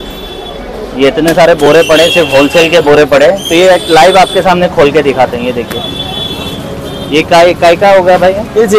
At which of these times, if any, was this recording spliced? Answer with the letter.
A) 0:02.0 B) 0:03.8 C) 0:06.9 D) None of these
D